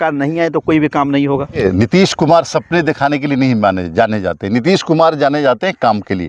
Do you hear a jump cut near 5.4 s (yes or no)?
no